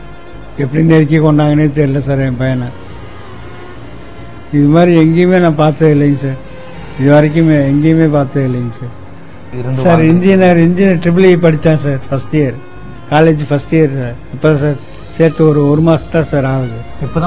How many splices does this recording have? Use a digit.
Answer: 1